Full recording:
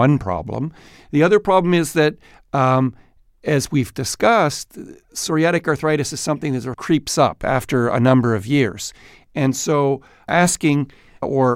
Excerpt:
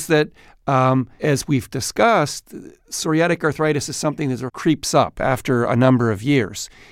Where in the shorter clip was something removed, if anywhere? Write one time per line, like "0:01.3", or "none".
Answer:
0:01.1